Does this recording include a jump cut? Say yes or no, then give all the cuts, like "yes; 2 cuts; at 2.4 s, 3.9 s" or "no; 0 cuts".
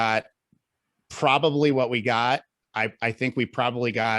yes; 1 cut; at 2.6 s